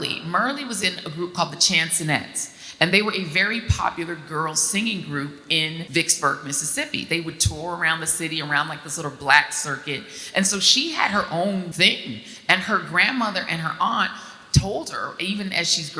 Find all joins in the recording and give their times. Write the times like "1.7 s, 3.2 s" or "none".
5.8 s, 11.7 s